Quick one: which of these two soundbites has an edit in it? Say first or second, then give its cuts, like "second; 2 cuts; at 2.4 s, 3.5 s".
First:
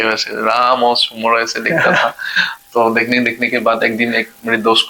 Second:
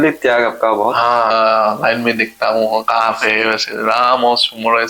second; 1 cut; at 1.3 s